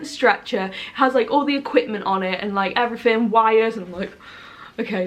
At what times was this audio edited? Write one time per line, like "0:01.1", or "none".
none